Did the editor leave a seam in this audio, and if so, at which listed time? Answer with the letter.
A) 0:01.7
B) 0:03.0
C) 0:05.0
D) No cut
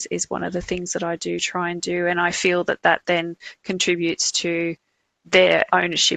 D